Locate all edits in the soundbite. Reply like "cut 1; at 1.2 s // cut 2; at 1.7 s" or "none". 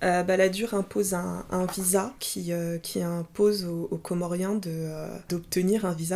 cut 1; at 2.3 s // cut 2; at 5.3 s